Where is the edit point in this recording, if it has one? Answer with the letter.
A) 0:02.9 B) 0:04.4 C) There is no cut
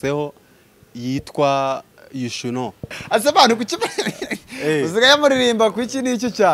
A